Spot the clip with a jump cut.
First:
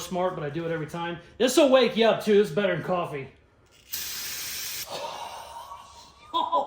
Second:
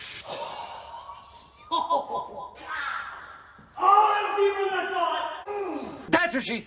second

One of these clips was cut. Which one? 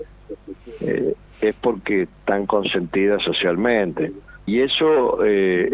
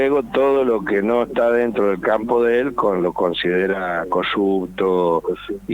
first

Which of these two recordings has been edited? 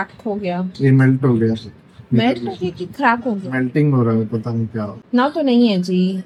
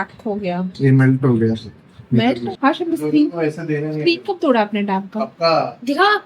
second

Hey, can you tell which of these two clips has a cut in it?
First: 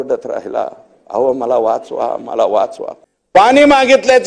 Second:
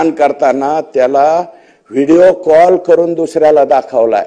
first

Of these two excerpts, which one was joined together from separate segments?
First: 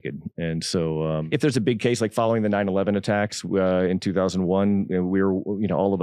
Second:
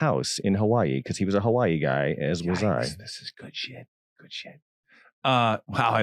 first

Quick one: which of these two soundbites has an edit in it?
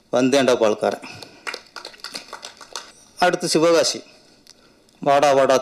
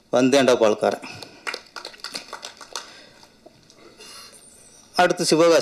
first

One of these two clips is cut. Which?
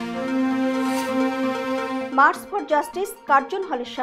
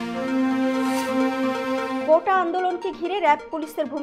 second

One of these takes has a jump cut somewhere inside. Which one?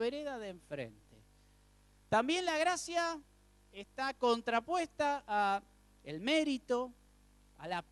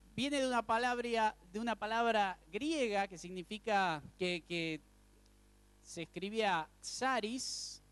first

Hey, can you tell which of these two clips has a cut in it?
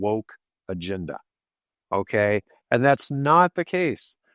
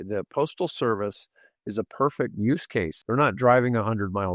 second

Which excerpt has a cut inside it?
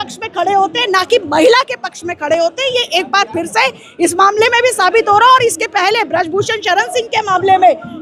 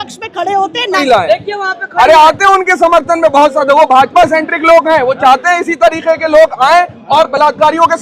second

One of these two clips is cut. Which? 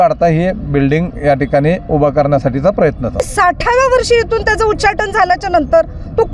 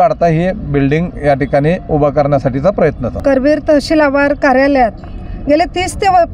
first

